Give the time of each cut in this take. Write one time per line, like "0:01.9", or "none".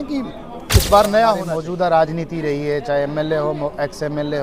0:01.5